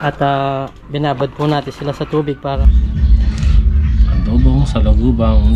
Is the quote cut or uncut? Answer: cut